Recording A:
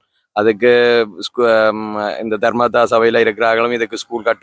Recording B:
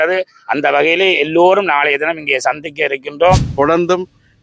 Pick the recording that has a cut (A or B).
B